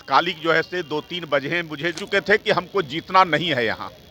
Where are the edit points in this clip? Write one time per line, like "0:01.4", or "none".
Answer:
0:02.0